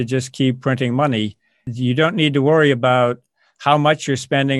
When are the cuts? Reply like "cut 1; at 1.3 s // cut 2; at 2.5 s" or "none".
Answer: cut 1; at 1.7 s